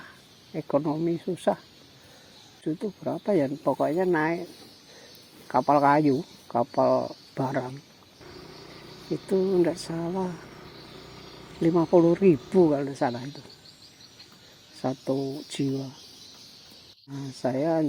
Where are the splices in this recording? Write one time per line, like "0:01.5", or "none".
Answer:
none